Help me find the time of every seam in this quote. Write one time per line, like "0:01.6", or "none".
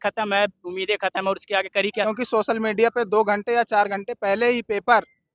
0:02.0